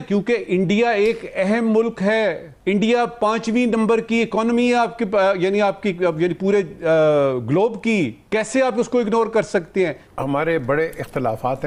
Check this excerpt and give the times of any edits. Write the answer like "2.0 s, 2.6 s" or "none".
none